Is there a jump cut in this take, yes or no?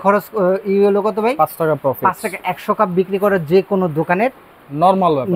no